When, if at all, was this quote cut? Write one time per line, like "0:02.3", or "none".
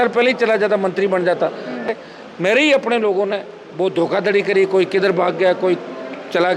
0:01.9

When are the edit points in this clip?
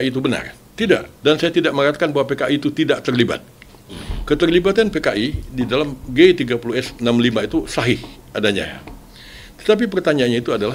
0:01.1

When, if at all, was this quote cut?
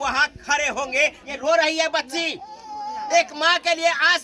0:01.3

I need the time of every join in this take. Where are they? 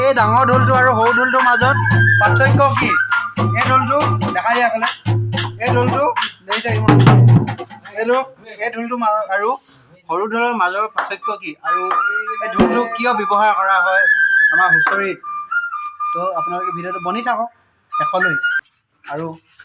none

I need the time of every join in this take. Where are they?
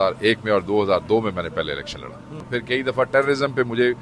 0:02.5

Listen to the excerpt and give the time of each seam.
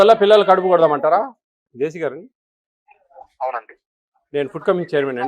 0:01.6

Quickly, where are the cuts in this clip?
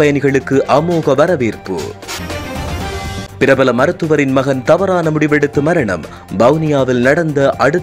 none

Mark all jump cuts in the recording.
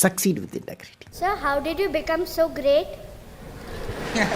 0:01.1

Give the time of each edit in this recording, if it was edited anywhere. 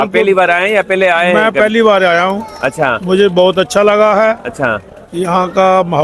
none

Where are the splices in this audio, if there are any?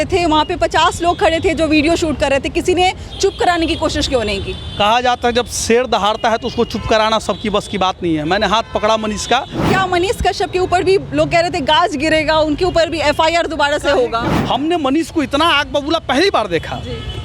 0:09.7
0:14.2

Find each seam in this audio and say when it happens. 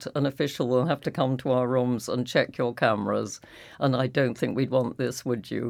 none

